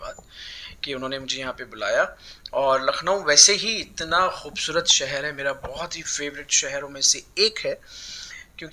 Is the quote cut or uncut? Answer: uncut